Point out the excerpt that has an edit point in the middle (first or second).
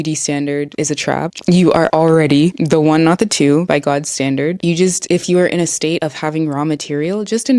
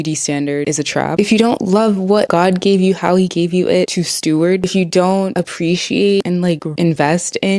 second